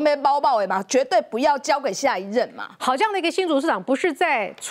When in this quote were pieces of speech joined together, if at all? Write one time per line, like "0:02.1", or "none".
none